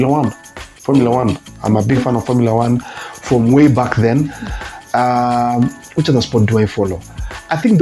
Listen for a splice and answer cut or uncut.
uncut